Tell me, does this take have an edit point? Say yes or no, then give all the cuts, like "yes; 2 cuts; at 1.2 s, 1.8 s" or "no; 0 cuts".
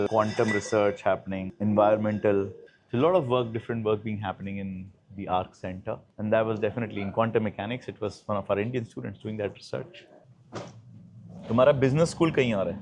no; 0 cuts